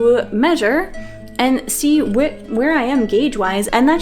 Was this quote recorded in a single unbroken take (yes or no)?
yes